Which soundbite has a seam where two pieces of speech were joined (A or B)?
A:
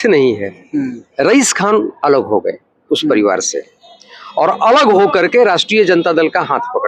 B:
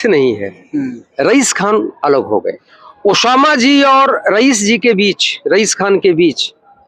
B